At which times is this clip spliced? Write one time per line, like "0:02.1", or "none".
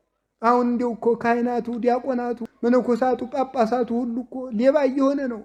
none

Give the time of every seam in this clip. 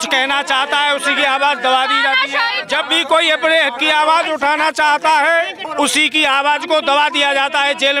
0:02.6
0:05.6

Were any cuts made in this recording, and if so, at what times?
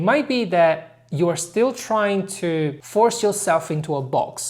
0:02.8

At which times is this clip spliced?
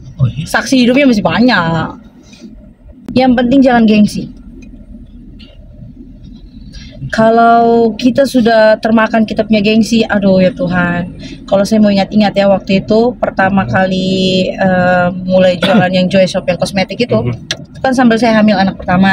0:03.0

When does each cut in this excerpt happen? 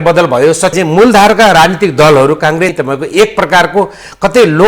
0:00.7
0:02.7

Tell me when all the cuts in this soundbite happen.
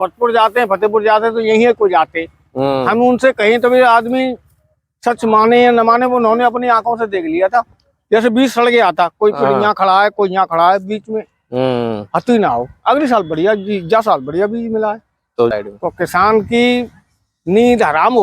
0:15.5

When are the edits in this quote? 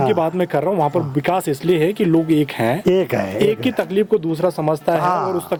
none

